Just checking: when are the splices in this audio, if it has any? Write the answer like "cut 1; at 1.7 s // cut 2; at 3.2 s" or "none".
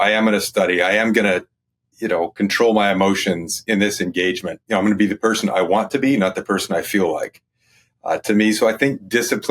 cut 1; at 4.5 s